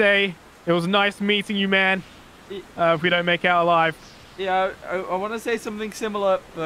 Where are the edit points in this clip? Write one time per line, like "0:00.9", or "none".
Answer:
none